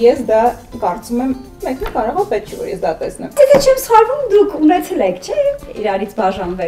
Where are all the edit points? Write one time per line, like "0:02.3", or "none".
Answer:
0:03.4

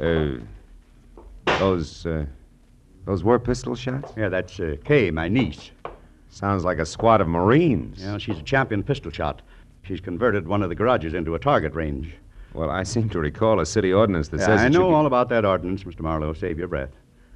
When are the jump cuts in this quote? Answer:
none

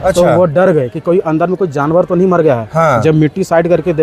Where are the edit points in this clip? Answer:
none

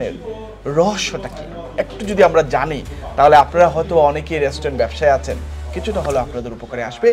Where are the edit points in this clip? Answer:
none

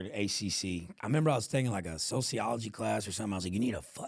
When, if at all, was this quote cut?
0:00.9

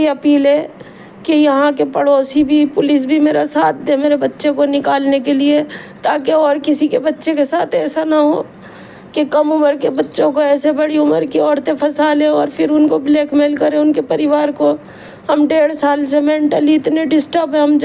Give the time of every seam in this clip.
none

